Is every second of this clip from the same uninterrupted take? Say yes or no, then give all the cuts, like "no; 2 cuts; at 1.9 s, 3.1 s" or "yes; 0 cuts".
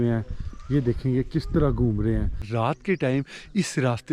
no; 1 cut; at 2.5 s